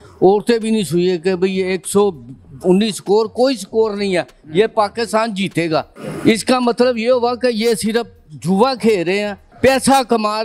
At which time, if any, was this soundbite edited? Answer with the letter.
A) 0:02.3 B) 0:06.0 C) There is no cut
B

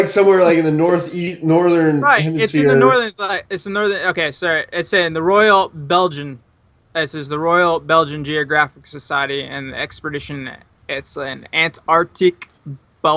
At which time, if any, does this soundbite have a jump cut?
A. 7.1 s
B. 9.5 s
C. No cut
A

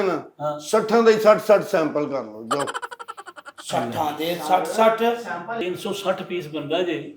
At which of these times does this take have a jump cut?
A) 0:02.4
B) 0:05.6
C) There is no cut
B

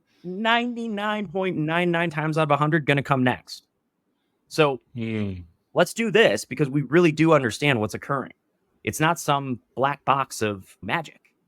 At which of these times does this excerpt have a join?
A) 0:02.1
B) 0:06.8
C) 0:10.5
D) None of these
A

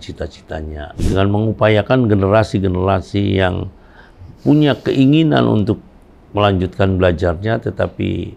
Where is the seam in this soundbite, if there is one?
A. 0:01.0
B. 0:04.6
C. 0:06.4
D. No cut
A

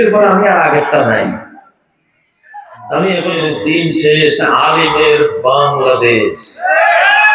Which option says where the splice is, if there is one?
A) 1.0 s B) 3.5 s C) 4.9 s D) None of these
B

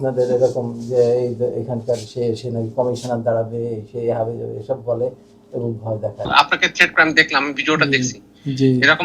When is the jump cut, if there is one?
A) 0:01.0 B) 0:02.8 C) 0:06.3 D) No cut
C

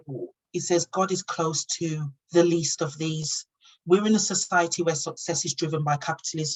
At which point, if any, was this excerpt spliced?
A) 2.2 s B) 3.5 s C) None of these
C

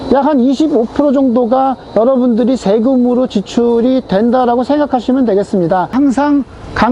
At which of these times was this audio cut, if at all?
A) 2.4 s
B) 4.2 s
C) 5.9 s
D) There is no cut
C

